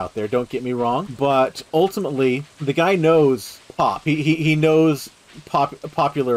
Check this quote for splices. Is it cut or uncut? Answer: cut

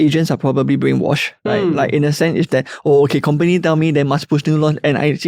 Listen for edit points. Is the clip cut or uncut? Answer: cut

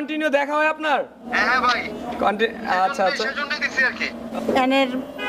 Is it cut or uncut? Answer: cut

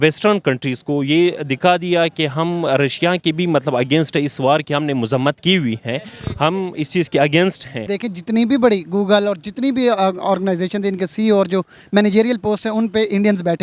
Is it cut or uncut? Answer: cut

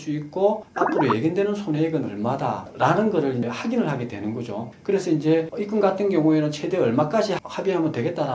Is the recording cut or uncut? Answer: uncut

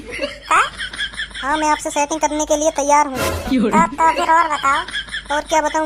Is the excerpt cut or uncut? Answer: cut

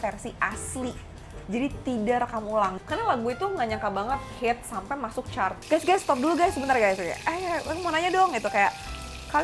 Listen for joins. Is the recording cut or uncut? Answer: cut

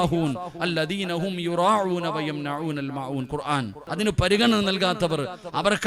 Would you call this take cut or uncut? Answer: cut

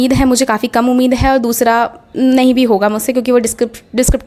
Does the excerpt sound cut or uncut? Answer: uncut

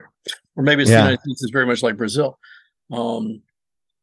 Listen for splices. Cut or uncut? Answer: uncut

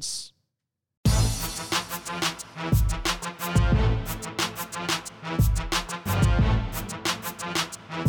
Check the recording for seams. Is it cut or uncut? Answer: cut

